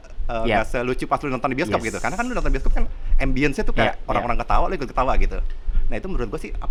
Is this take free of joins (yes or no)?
yes